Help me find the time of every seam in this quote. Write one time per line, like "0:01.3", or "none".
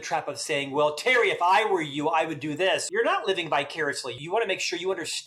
0:02.8
0:04.2